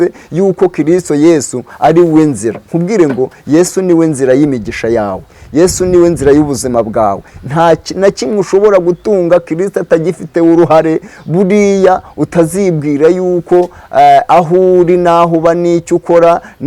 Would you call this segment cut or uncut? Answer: uncut